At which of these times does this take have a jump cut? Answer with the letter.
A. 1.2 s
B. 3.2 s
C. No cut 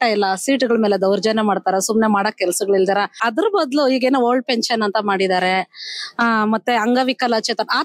B